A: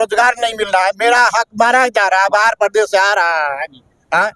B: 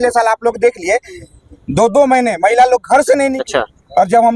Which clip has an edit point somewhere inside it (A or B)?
B